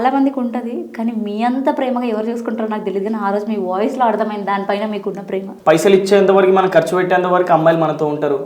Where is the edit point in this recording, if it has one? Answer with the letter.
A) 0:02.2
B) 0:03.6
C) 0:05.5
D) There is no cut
C